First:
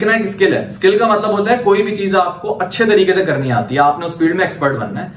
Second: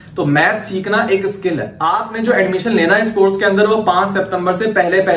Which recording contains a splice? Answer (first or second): second